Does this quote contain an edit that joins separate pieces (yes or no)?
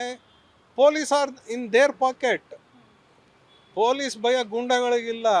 no